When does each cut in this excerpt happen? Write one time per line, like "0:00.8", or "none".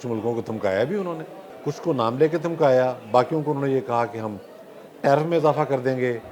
0:01.5